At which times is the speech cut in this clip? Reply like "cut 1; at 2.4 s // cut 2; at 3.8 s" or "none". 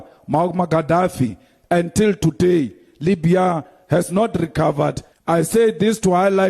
cut 1; at 5.1 s